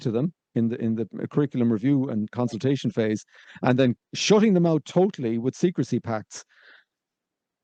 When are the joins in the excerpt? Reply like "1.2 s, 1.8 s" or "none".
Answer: none